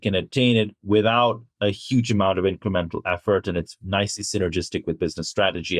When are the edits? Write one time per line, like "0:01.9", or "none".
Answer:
none